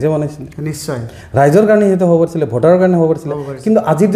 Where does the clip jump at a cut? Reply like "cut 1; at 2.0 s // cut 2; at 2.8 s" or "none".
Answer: none